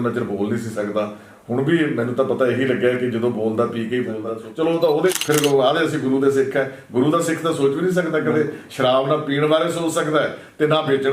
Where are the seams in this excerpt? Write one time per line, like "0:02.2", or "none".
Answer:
0:04.2
0:05.1